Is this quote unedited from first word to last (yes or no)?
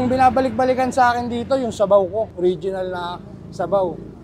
yes